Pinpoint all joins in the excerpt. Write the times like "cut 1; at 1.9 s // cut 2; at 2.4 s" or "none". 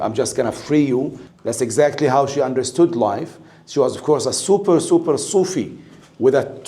cut 1; at 1.2 s